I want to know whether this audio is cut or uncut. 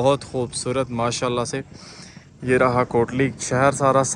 uncut